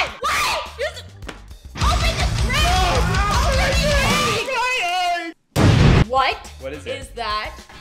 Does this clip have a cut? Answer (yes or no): yes